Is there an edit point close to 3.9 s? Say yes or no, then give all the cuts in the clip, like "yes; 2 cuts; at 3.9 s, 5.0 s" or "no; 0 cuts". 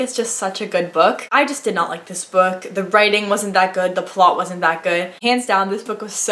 no; 2 cuts; at 1.2 s, 5.2 s